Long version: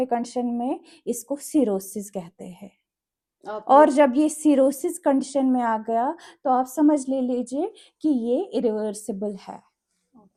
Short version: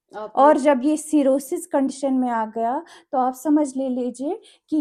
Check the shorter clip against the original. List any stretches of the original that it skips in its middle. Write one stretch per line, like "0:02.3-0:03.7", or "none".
none